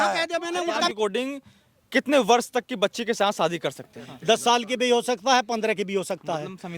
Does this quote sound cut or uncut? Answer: cut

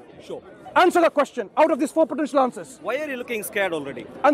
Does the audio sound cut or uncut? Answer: uncut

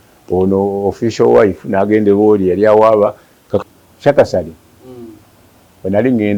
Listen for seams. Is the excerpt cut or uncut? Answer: cut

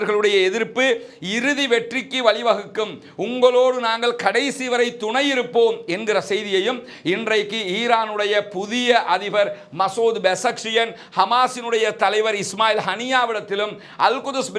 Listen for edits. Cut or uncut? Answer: uncut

